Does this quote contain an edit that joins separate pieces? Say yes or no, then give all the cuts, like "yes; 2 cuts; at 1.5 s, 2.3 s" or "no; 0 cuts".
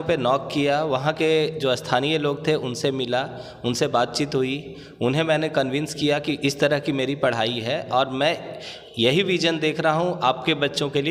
no; 0 cuts